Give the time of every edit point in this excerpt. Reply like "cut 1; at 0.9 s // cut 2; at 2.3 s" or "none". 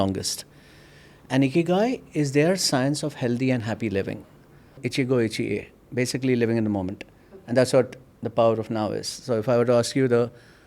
cut 1; at 4.8 s